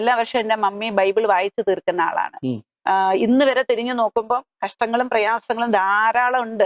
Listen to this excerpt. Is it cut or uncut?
cut